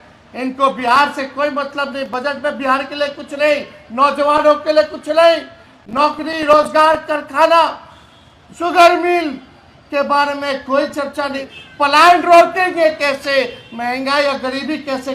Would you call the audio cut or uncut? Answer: cut